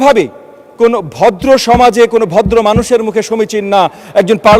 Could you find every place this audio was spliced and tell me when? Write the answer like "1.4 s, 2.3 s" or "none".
none